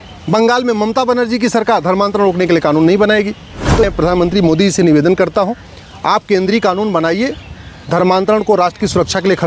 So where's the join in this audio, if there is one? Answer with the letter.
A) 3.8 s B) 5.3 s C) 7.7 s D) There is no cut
A